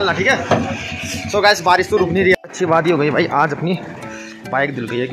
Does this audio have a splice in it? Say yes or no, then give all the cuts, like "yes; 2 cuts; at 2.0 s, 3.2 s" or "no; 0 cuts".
yes; 1 cut; at 2.3 s